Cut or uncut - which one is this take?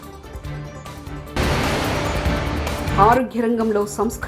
cut